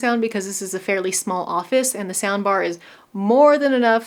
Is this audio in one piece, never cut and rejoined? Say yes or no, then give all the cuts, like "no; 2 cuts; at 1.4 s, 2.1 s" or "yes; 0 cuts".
yes; 0 cuts